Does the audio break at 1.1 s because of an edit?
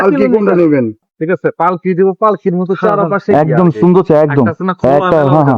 yes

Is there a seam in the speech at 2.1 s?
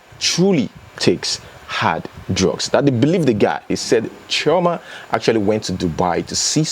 no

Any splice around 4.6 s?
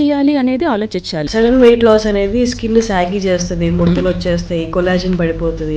no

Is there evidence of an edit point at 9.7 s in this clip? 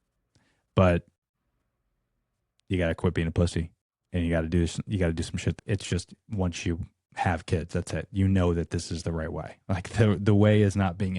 no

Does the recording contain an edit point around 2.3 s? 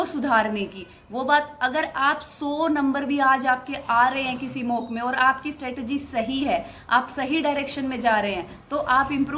no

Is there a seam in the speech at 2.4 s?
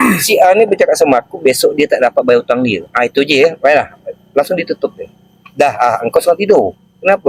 no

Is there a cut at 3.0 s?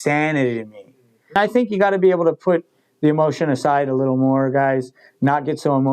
no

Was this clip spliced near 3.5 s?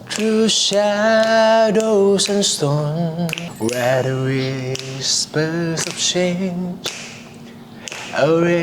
yes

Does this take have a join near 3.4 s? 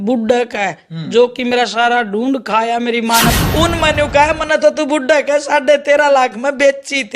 yes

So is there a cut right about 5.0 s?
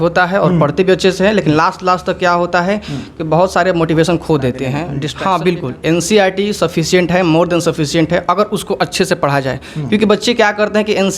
yes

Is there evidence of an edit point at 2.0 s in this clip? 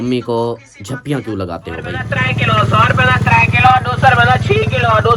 yes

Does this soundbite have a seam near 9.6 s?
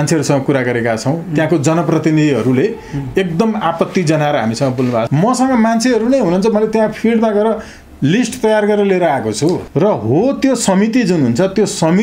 yes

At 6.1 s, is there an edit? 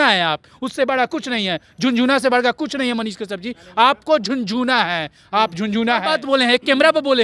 yes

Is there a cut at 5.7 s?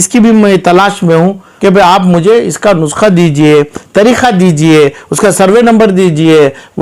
no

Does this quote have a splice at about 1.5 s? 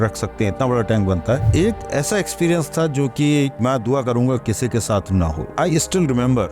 yes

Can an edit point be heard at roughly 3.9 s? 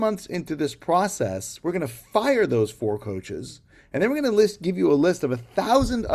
no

